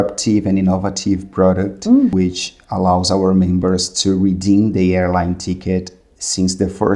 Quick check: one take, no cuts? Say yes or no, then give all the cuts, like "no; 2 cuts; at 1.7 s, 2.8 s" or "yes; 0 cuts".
no; 1 cut; at 2.1 s